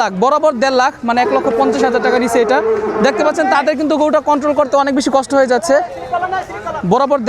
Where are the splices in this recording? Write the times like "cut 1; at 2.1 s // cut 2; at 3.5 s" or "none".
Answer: none